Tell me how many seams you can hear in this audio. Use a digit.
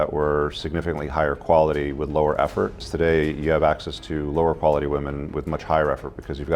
1